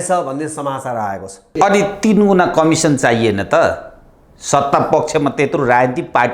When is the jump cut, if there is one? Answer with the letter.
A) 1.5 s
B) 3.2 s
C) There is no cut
A